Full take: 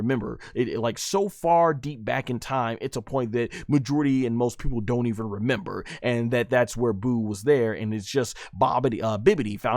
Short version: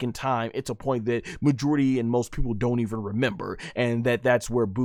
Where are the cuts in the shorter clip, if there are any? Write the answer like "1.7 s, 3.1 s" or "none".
none